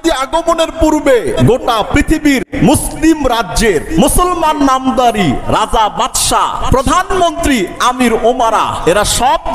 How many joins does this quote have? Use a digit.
4